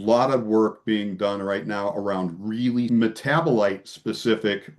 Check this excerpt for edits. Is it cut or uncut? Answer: cut